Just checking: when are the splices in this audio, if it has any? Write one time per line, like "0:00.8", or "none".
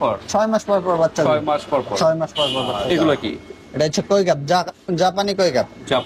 0:03.0